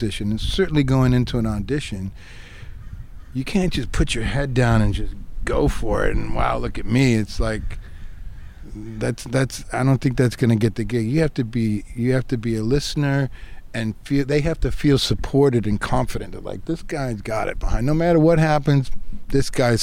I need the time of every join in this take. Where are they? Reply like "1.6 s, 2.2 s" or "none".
none